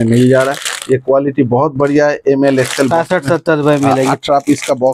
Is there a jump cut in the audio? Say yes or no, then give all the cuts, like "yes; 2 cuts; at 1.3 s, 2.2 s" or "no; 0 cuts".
no; 0 cuts